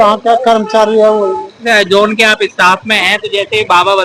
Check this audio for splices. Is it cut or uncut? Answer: cut